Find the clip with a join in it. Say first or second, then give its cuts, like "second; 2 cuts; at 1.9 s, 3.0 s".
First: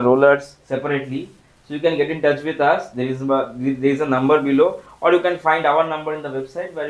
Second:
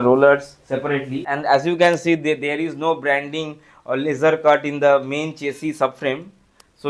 second; 1 cut; at 1.3 s